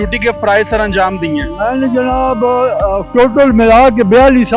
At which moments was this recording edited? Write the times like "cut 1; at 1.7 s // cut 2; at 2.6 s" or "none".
none